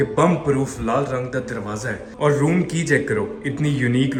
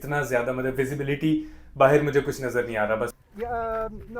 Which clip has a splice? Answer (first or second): second